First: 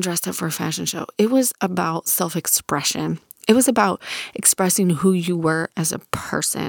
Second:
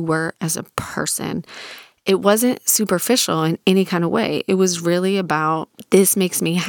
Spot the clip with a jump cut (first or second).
second